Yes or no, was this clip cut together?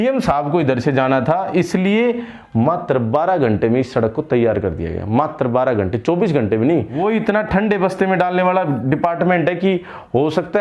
yes